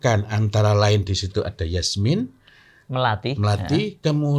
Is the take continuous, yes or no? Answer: yes